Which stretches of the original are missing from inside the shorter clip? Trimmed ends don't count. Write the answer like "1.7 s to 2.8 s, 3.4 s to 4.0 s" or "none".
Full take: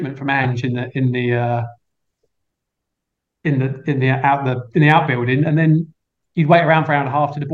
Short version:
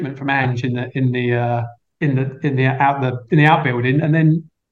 1.8 s to 3.2 s